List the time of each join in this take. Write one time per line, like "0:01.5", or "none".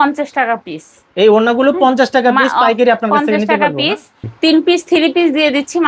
0:04.1